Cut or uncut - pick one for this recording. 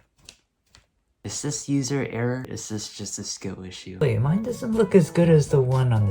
cut